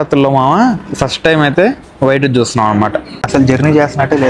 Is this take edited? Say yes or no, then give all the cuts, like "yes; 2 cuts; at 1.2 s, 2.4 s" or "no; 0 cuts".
yes; 1 cut; at 3.2 s